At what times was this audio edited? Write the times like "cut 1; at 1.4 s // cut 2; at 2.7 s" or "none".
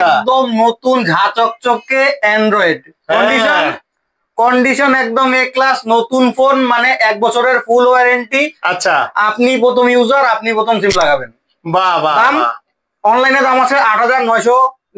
none